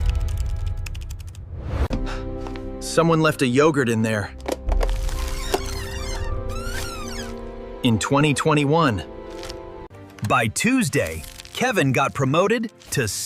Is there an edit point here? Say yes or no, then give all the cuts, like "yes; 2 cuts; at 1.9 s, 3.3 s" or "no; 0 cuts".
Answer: yes; 1 cut; at 4.4 s